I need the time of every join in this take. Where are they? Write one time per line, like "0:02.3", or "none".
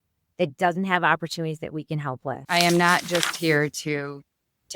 0:02.4